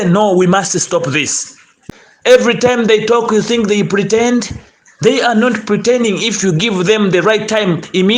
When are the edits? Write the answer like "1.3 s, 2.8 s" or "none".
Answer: 1.8 s